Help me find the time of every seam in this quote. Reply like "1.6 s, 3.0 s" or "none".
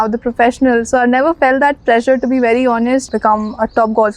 3.1 s

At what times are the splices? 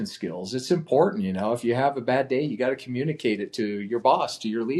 none

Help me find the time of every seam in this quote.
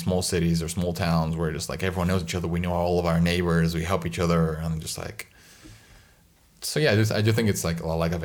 none

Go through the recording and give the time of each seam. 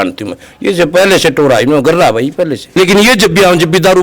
2.6 s

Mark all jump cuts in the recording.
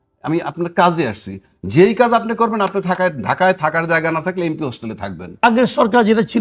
5.4 s

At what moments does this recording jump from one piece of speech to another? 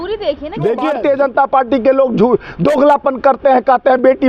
0.9 s

